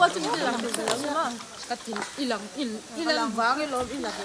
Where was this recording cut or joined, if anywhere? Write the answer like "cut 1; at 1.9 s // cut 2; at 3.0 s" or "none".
none